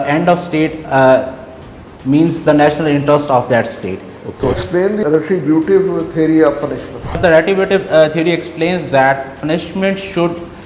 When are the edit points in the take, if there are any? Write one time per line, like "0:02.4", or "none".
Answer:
0:04.9
0:07.2